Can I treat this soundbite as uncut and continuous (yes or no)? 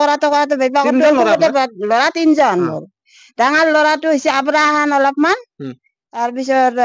yes